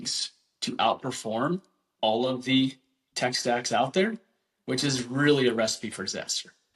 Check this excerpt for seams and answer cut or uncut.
uncut